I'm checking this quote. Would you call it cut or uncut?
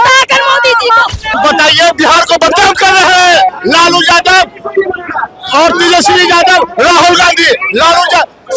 cut